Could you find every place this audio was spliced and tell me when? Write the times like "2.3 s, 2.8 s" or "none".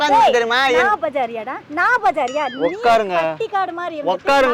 none